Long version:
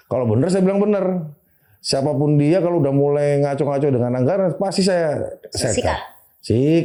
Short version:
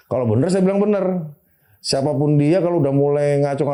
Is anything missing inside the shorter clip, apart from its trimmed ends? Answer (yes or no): no